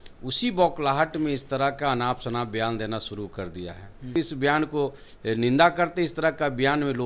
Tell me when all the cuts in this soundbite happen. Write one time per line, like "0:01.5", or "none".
0:04.1

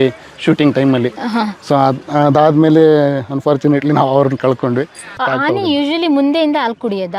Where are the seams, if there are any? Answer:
0:05.1

